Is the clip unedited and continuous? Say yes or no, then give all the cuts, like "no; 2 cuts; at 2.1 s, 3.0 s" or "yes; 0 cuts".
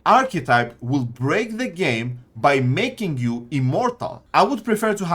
no; 1 cut; at 4.2 s